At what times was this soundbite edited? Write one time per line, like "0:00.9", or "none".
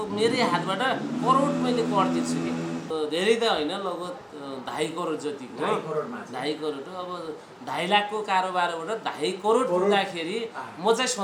0:02.8